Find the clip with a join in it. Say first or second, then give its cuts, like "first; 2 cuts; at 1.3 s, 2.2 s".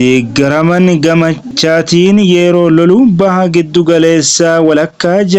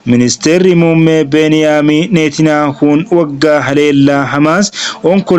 first; 1 cut; at 1.5 s